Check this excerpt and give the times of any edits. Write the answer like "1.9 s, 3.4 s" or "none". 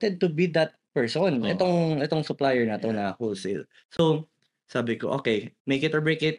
4.0 s, 5.5 s